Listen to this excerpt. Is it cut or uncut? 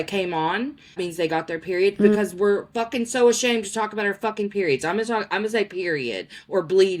cut